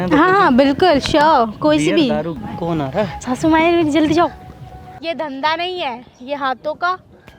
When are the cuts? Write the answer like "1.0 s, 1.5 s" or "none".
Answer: 2.3 s, 5.0 s